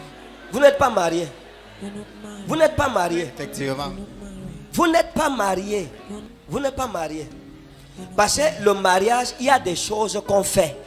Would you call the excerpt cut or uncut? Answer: uncut